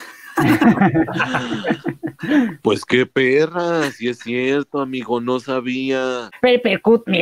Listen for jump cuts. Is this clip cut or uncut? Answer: cut